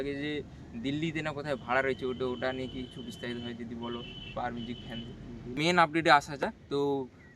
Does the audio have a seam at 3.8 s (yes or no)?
no